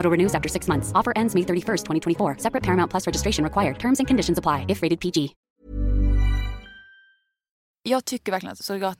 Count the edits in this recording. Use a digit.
1